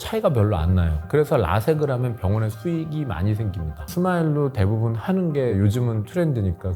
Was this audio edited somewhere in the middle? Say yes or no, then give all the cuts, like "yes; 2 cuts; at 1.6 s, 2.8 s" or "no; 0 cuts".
yes; 1 cut; at 3.9 s